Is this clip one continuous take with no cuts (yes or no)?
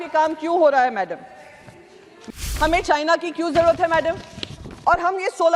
no